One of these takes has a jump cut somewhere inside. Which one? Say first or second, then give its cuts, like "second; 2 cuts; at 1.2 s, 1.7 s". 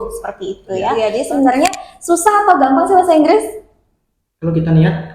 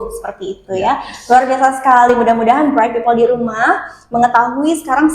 first; 1 cut; at 0.9 s